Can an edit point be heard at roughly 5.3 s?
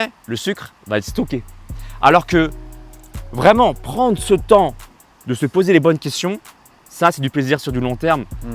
no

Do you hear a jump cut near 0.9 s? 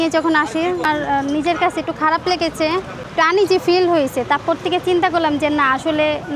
yes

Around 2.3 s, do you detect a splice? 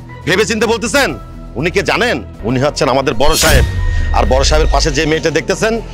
yes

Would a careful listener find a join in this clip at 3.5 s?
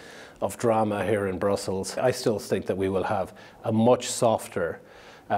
no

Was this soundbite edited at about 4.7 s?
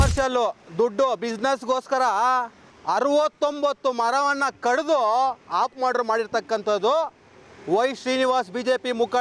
no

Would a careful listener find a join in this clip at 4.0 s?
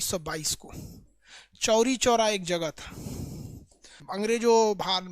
yes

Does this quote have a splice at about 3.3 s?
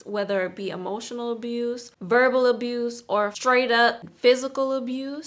yes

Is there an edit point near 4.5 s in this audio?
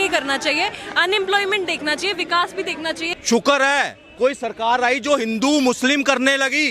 no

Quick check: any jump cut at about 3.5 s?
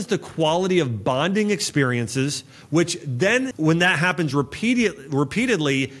yes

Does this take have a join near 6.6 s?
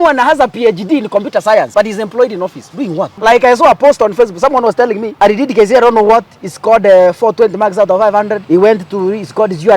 no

